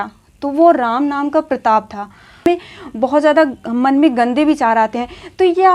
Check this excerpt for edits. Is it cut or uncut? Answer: cut